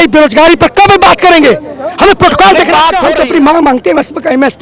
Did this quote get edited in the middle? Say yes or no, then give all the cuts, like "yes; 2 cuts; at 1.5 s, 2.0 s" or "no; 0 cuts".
yes; 1 cut; at 3.0 s